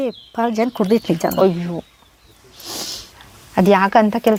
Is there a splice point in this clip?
no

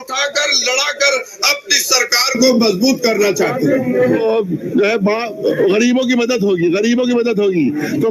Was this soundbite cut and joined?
yes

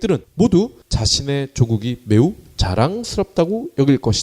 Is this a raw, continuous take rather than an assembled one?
yes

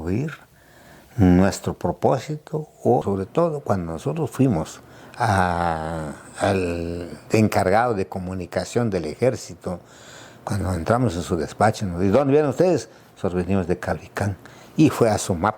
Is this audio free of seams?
no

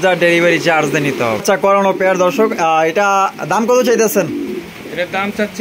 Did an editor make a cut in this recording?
yes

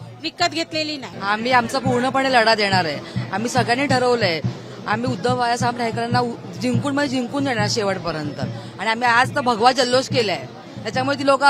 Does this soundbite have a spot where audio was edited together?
yes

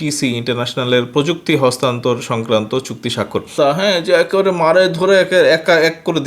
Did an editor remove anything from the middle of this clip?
yes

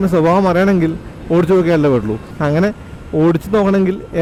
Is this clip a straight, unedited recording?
yes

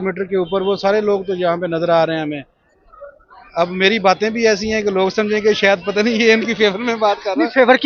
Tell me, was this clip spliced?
no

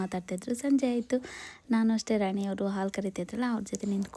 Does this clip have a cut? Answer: no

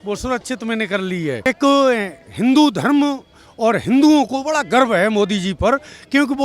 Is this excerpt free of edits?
no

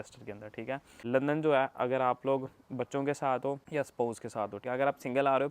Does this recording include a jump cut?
yes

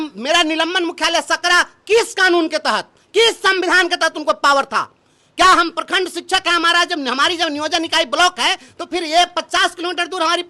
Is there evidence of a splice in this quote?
no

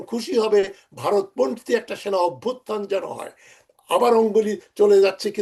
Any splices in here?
no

